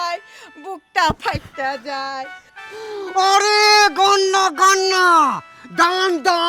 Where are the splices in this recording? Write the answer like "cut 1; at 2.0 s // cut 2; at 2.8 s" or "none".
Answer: cut 1; at 2.4 s

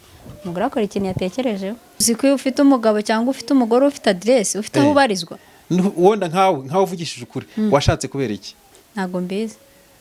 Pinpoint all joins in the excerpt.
cut 1; at 2.0 s

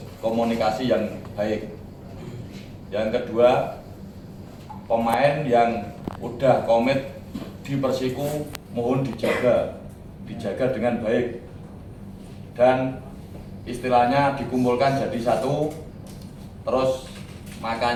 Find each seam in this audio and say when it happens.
none

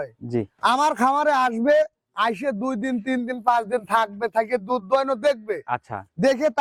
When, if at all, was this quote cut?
none

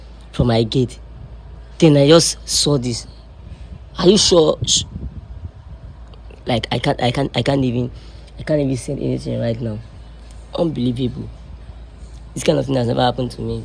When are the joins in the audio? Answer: none

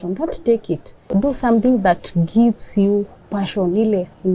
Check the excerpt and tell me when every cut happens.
cut 1; at 1.1 s

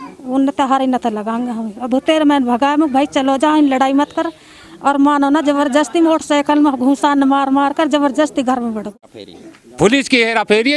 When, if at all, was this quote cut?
cut 1; at 8.9 s

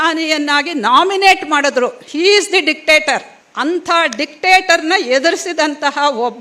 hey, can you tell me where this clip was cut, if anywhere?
none

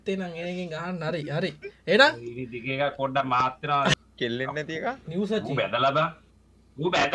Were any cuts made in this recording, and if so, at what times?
cut 1; at 3.9 s

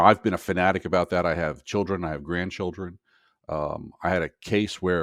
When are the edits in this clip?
none

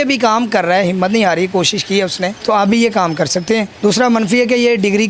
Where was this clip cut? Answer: cut 1; at 2.4 s // cut 2; at 3.7 s

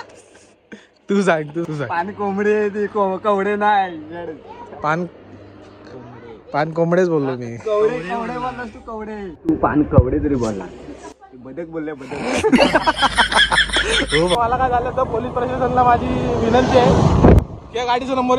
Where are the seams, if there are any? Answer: cut 1; at 9.4 s // cut 2; at 14.3 s

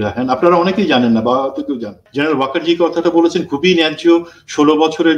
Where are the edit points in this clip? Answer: cut 1; at 2.0 s

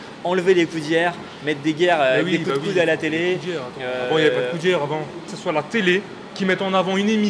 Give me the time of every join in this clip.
cut 1; at 5.3 s

